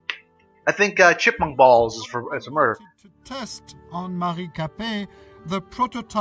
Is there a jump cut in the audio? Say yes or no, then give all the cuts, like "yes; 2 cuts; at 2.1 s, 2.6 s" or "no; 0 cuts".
no; 0 cuts